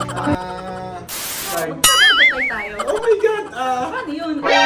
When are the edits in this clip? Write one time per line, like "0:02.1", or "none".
0:01.5